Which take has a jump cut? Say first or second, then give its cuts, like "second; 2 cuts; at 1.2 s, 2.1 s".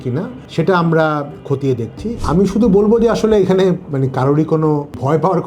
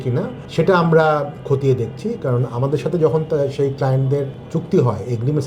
first; 1 cut; at 2.2 s